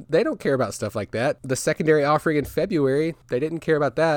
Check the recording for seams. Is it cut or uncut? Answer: cut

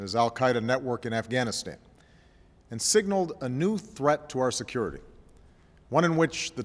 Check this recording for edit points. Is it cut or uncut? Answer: cut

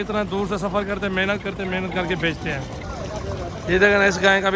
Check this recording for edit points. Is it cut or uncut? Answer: cut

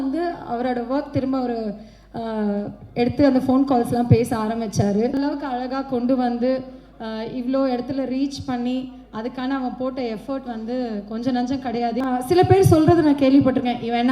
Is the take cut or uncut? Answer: cut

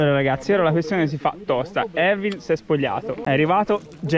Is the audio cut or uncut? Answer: cut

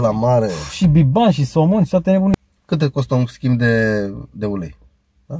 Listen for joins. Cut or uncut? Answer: cut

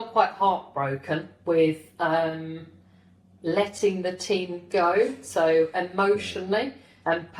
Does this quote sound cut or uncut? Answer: uncut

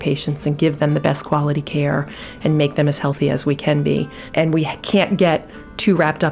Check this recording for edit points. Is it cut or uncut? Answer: cut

